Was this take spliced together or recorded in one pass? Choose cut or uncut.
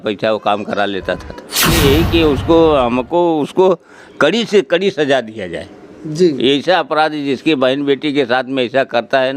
cut